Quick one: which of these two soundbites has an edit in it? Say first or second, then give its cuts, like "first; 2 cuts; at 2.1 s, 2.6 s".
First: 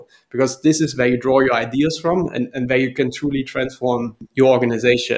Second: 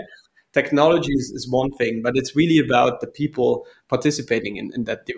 first; 1 cut; at 4.3 s